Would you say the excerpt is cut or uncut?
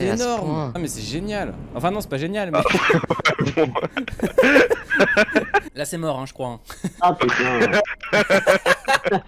cut